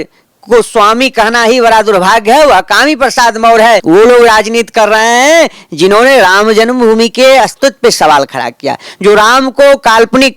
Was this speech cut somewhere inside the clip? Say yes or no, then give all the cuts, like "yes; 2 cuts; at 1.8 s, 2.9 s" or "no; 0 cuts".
yes; 1 cut; at 3.8 s